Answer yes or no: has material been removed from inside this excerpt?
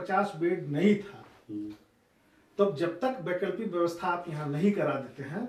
no